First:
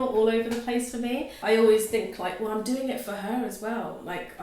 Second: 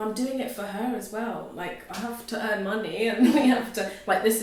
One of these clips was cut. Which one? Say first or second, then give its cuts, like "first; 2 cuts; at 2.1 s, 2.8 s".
first; 1 cut; at 1.3 s